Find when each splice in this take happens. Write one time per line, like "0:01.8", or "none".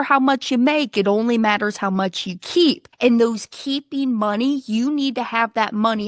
0:02.9